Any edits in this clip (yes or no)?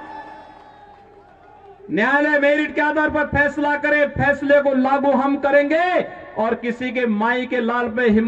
no